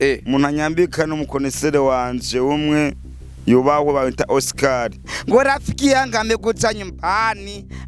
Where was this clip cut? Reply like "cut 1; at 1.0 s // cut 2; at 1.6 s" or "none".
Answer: cut 1; at 5.1 s